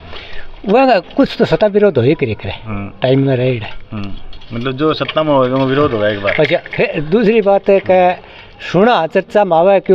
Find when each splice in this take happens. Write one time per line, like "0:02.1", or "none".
none